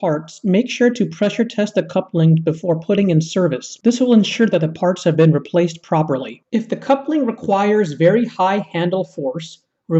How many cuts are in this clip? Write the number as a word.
one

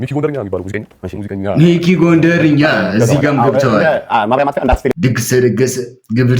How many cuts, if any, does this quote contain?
one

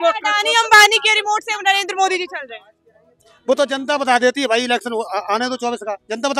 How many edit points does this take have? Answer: zero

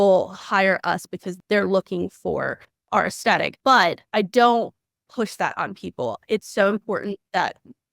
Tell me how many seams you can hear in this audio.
three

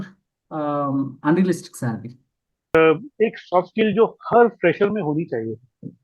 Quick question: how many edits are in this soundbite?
one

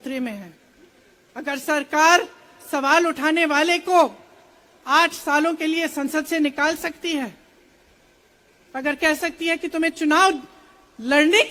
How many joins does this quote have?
zero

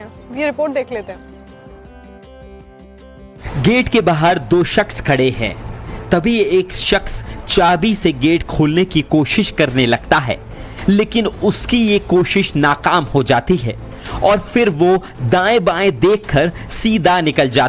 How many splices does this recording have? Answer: one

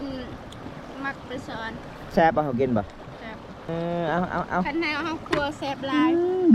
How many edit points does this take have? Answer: one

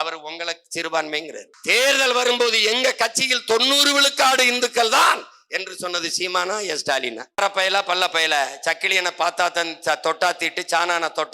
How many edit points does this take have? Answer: two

